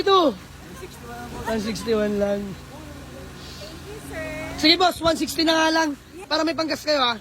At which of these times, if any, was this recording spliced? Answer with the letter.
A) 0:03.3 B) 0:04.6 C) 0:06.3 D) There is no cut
C